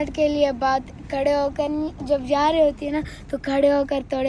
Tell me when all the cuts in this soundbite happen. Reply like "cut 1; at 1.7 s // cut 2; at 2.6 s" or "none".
none